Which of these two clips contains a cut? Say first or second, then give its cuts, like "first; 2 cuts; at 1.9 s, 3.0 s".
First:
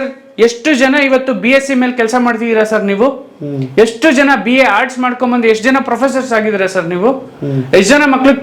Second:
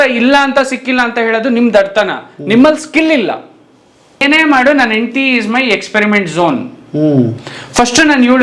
second; 1 cut; at 4.2 s